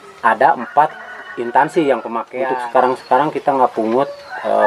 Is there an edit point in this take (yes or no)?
yes